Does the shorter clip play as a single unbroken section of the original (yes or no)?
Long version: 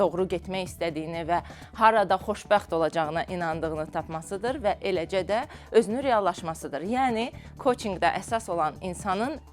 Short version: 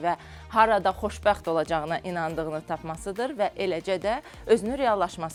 yes